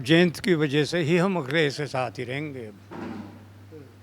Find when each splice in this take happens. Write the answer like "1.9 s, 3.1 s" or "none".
none